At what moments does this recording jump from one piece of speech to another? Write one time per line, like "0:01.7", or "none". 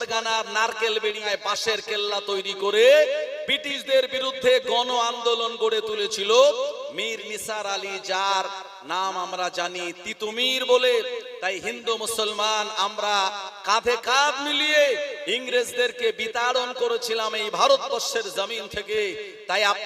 0:01.2

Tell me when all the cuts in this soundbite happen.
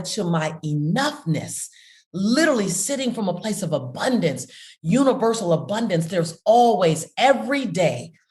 none

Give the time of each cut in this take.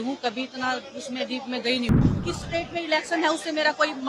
0:02.0

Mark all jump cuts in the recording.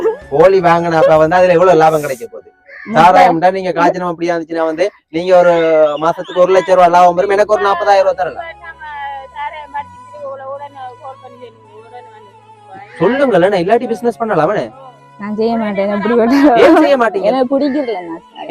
none

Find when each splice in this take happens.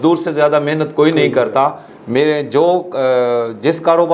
0:01.8

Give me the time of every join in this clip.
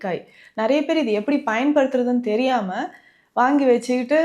none

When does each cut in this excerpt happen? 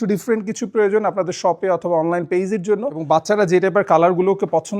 0:03.0

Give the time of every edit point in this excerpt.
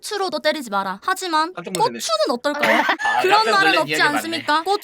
0:03.0

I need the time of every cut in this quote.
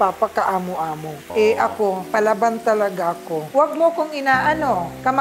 0:01.2
0:03.5

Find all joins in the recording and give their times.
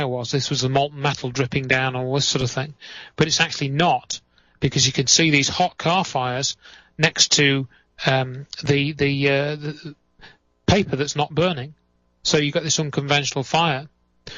0:13.4

